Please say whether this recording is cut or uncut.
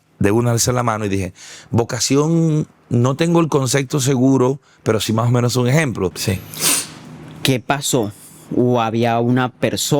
cut